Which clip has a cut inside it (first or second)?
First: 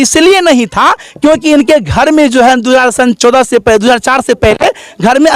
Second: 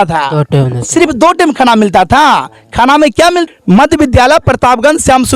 second